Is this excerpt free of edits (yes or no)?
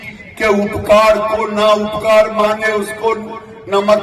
yes